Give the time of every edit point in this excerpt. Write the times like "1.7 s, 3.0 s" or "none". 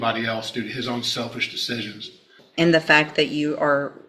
2.4 s